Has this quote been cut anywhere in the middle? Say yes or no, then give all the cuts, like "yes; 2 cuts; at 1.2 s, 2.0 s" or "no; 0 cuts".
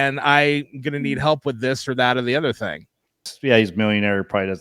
yes; 1 cut; at 3.2 s